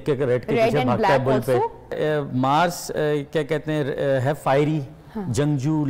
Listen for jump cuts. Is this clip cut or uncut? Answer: cut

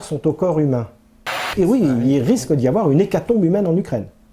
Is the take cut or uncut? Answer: cut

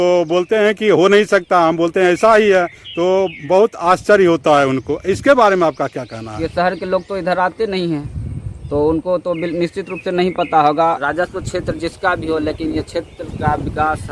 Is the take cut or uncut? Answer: cut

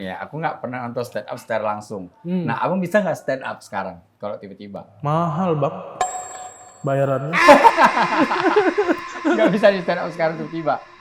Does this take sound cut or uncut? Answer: uncut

